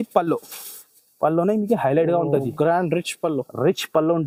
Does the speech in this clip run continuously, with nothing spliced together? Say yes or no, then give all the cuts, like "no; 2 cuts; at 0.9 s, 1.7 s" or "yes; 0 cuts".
yes; 0 cuts